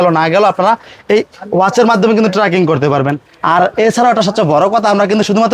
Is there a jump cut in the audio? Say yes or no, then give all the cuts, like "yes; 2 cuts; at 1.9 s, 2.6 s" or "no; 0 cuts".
no; 0 cuts